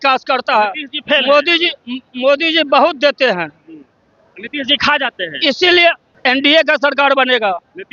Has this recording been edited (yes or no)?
yes